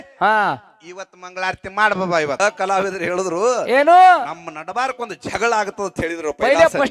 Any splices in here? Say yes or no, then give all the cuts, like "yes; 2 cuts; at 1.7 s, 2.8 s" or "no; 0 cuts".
yes; 1 cut; at 2.4 s